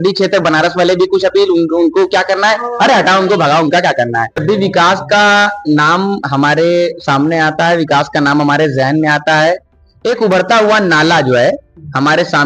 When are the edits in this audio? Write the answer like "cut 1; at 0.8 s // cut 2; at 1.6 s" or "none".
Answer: cut 1; at 4.4 s